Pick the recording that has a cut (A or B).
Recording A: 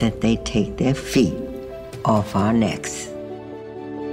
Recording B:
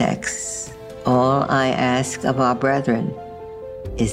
A